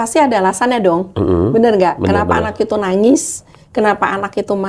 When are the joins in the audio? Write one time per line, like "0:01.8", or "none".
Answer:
none